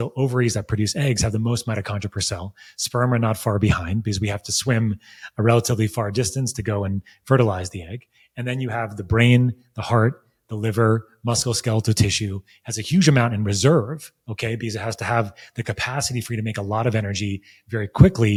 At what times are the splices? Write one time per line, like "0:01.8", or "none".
none